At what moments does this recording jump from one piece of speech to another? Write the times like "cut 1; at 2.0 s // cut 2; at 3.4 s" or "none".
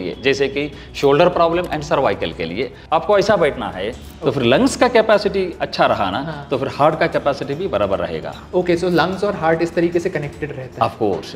cut 1; at 3.9 s